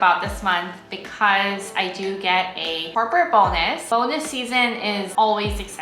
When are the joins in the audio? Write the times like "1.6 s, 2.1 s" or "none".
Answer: 3.9 s